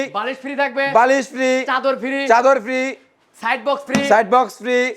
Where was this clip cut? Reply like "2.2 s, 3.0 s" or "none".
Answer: none